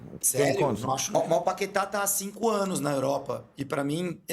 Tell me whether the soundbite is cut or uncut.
cut